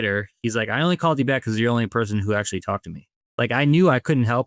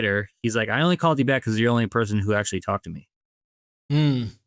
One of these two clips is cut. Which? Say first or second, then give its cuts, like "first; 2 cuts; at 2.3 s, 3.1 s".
first; 1 cut; at 3.2 s